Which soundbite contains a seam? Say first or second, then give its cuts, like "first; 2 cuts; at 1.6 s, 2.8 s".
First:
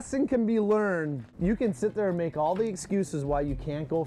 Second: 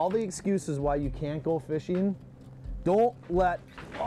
first; 1 cut; at 1.2 s